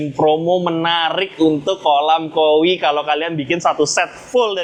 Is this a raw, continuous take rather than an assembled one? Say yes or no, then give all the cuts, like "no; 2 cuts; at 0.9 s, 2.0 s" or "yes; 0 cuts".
yes; 0 cuts